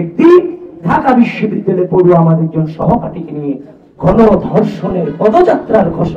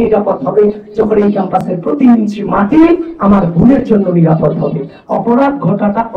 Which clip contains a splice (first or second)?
second